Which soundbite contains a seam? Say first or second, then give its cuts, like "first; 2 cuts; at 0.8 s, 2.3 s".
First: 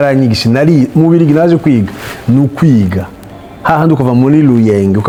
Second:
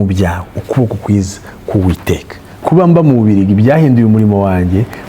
second; 1 cut; at 2.6 s